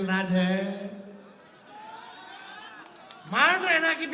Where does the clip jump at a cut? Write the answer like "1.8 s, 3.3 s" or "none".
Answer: none